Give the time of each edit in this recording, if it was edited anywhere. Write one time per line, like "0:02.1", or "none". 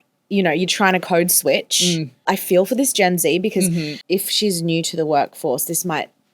0:02.3
0:03.9